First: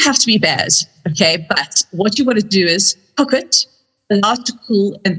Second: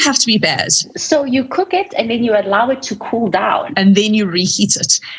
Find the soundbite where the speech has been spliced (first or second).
second